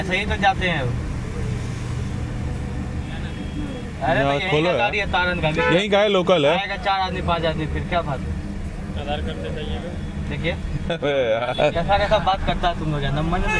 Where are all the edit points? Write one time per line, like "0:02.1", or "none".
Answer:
none